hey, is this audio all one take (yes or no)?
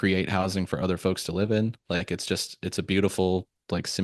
yes